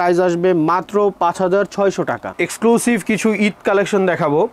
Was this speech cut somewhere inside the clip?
yes; 1 cut; at 2.2 s

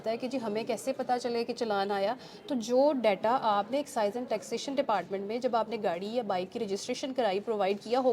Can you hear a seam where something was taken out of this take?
no; 0 cuts

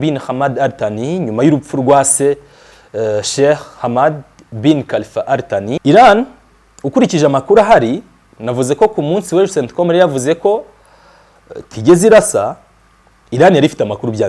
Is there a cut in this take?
yes; 1 cut; at 5.8 s

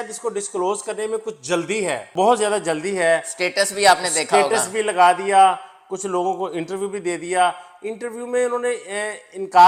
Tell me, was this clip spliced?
no; 0 cuts

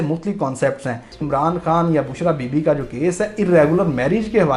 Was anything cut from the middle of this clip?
yes; 1 cut; at 1.2 s

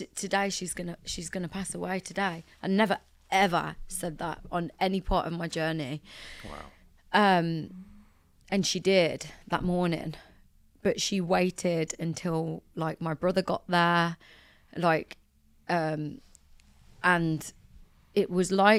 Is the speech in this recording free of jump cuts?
yes; 0 cuts

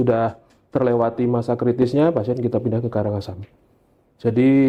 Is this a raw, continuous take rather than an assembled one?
yes; 0 cuts

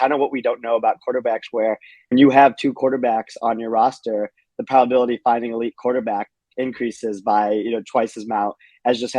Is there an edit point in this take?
yes; 1 cut; at 1.9 s

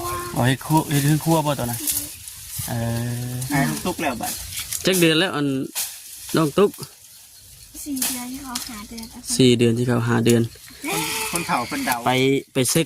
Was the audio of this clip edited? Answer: yes; 1 cut; at 3.4 s

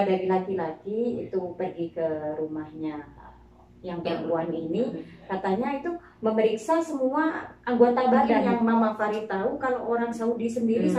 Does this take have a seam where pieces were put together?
yes; 1 cut; at 8.5 s

